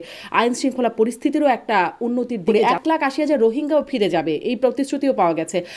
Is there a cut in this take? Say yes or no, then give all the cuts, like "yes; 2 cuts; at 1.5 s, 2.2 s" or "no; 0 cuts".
yes; 1 cut; at 2.4 s